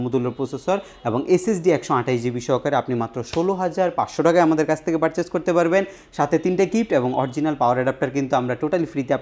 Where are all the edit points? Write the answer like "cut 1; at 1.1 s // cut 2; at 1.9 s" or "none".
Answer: none